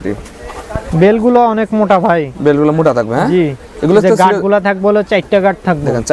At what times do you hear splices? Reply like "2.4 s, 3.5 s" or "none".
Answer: none